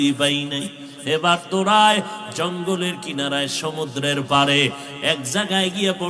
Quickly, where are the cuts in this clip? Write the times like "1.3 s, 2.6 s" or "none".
none